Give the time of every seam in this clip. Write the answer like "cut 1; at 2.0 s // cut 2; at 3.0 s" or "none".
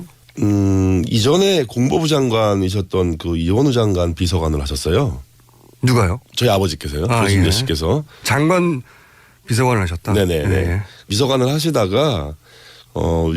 cut 1; at 5.7 s